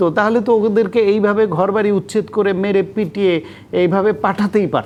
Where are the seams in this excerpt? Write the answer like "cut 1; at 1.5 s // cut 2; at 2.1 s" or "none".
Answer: none